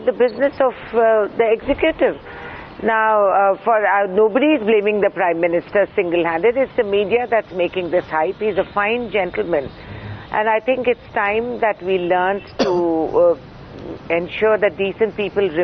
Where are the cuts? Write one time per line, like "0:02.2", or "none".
0:02.8